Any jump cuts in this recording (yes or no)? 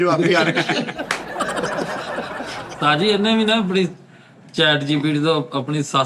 yes